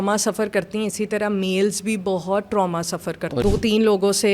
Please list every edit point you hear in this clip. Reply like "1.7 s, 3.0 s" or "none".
3.4 s